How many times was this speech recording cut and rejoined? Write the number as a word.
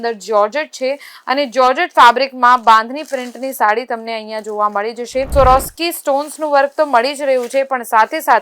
one